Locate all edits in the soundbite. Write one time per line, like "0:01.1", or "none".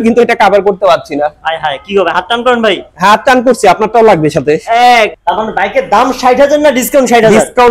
0:05.2